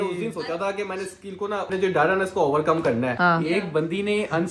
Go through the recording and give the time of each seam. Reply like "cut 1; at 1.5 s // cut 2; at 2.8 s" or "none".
cut 1; at 1.7 s // cut 2; at 3.1 s